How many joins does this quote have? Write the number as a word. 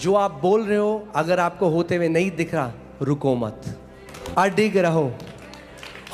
one